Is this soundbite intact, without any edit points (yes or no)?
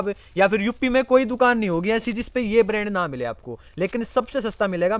yes